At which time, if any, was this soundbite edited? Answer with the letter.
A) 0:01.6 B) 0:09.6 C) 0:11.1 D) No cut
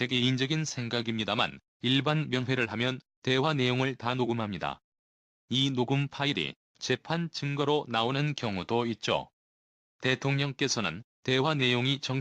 A